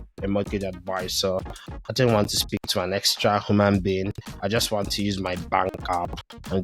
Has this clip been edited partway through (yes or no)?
no